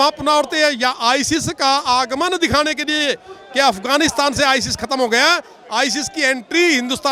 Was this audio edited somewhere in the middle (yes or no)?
no